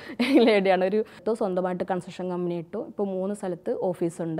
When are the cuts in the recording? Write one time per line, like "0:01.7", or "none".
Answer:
0:01.2